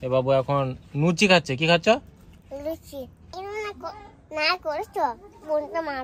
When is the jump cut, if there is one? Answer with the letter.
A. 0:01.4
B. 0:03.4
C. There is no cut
B